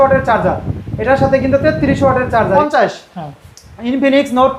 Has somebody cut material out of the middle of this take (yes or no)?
yes